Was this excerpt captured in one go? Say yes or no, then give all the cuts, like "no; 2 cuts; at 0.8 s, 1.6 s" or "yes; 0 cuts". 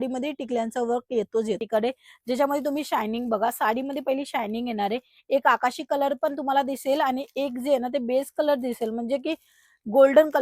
no; 1 cut; at 1.6 s